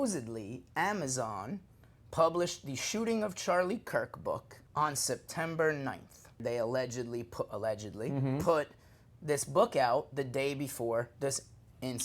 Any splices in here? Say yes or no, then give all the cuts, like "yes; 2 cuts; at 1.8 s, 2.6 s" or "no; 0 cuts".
yes; 2 cuts; at 4.6 s, 6.4 s